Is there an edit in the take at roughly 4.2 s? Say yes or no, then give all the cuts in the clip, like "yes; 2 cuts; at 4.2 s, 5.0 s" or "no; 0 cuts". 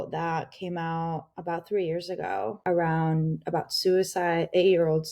no; 1 cut; at 2.6 s